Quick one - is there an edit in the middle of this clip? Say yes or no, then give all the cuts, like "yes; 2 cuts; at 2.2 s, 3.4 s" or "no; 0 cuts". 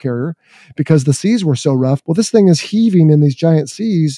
yes; 1 cut; at 2.0 s